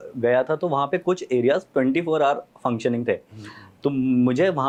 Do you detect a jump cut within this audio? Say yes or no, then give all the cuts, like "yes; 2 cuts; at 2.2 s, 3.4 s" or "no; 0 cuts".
no; 0 cuts